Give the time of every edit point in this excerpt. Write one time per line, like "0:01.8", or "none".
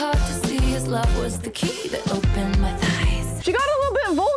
0:03.3